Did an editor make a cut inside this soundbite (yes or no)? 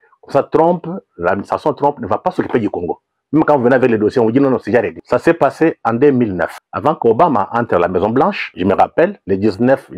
yes